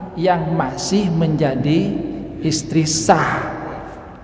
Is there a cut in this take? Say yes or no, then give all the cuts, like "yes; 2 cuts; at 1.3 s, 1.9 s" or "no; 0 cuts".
no; 0 cuts